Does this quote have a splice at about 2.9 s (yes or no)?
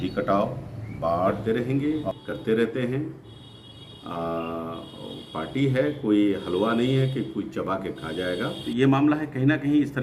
no